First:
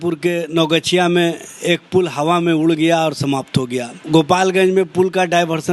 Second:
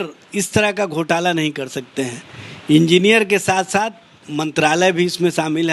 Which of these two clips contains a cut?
first; 1 cut; at 3.9 s

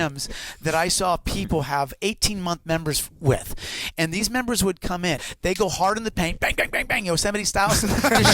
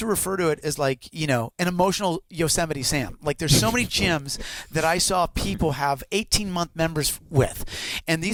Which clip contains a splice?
first; 1 cut; at 5.2 s

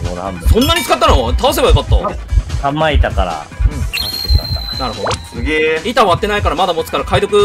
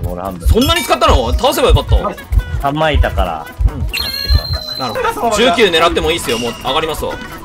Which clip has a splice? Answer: second; 1 cut; at 5.0 s

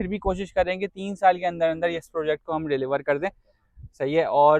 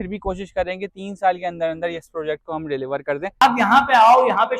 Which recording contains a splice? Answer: second; 1 cut; at 3.4 s

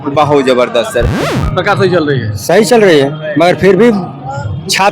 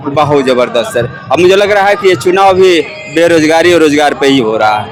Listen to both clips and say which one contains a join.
first; 1 cut; at 1.2 s

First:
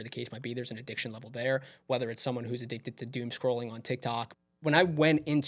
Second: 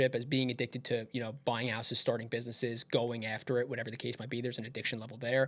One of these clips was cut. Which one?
first; 1 cut; at 4.4 s

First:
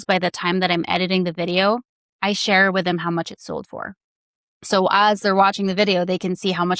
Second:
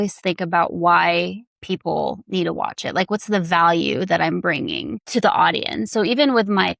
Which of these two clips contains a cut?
second; 1 cut; at 5.0 s

